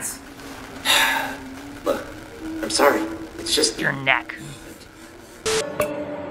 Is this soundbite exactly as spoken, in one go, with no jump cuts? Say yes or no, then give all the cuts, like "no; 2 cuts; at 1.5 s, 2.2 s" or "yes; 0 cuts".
yes; 0 cuts